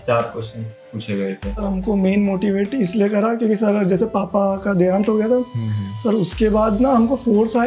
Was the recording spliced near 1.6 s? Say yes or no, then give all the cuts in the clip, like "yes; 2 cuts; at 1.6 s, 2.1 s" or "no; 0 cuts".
yes; 1 cut; at 1.6 s